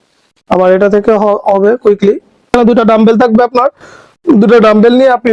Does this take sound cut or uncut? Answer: cut